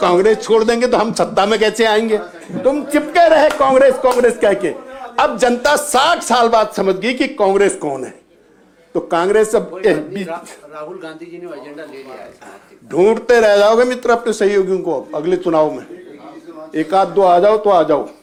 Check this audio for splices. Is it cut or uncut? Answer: uncut